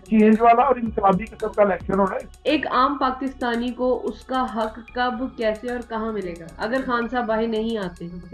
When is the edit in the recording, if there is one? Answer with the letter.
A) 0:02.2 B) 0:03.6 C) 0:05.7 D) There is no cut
A